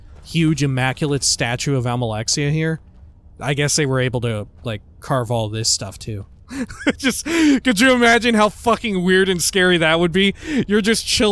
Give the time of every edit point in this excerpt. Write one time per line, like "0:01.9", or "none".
0:06.4